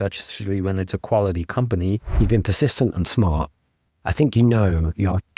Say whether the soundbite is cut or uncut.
cut